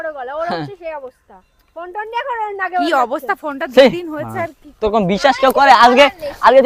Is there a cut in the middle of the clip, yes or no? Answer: no